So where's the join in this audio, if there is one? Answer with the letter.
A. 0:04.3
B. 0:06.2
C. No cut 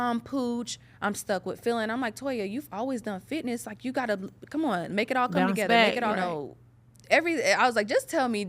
B